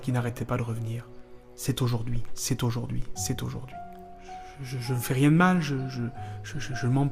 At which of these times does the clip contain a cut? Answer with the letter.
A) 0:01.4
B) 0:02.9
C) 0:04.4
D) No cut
C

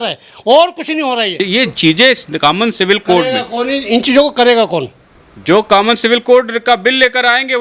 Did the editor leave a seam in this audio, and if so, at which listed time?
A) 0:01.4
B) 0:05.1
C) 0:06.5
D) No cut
A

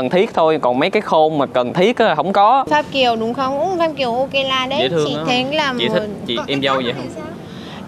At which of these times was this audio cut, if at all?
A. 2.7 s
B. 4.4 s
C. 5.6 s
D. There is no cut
A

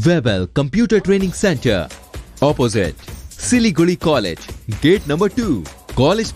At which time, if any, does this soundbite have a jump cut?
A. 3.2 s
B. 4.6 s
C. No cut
C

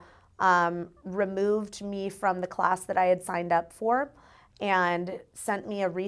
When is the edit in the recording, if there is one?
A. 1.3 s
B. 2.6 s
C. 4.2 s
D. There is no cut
D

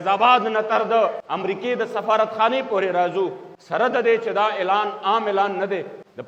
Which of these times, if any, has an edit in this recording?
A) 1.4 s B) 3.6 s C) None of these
C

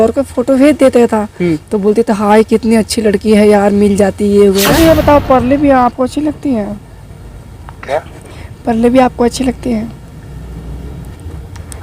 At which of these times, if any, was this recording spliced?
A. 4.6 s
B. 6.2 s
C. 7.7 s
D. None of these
A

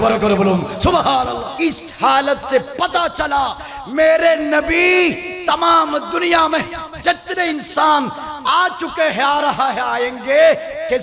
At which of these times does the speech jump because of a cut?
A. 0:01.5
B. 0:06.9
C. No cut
A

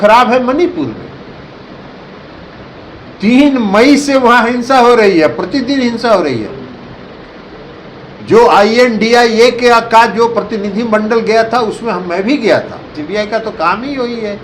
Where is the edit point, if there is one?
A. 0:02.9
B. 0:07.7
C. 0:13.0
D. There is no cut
C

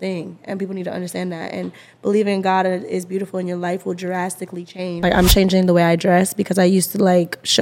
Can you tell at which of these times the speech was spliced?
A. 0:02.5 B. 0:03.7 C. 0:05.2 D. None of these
C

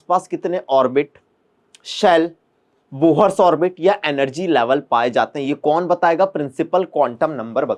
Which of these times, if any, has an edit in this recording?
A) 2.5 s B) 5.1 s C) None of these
C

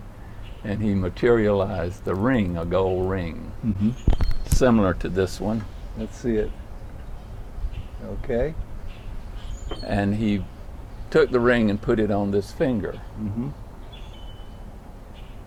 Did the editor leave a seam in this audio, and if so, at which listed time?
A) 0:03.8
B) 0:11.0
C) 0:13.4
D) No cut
D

